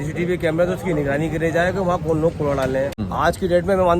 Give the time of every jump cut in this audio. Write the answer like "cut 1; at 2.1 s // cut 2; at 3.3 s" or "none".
cut 1; at 3.0 s